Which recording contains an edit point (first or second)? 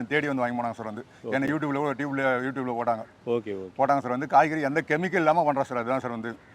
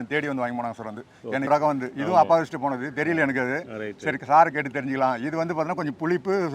second